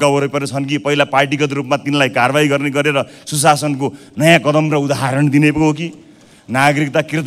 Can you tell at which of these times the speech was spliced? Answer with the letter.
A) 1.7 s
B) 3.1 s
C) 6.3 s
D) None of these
D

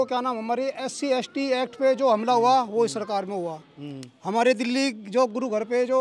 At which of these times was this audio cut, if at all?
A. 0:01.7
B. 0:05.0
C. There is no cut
C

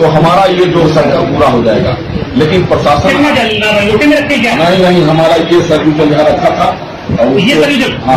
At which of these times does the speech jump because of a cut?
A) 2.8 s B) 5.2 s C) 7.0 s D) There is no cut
D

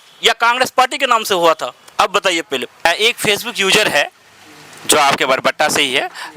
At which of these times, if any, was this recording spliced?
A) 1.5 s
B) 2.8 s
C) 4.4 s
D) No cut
B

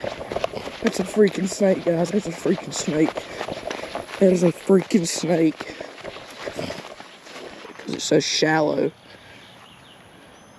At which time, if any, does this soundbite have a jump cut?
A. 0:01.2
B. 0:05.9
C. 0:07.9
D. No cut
C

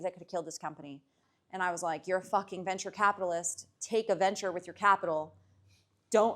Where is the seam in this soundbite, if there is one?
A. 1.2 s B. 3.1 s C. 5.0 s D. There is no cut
A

